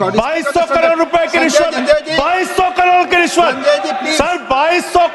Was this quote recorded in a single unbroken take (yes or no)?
no